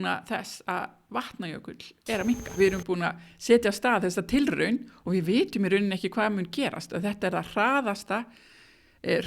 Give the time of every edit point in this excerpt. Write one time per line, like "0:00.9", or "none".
0:02.6